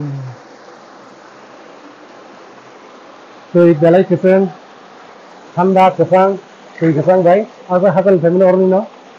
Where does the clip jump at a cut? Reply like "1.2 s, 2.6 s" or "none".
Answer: none